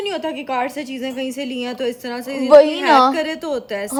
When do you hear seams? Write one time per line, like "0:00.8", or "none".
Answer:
none